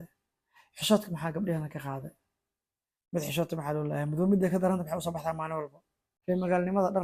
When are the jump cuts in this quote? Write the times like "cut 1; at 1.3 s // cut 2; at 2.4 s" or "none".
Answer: cut 1; at 6.1 s